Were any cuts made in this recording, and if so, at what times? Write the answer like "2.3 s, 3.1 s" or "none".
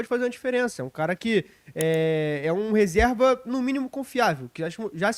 none